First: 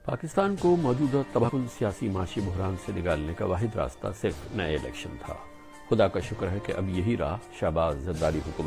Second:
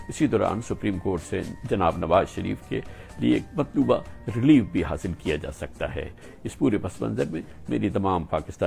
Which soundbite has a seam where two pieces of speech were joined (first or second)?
first